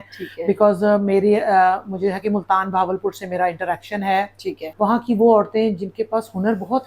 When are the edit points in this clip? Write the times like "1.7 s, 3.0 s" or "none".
4.6 s